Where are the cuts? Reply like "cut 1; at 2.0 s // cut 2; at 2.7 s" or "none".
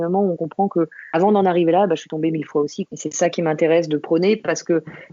none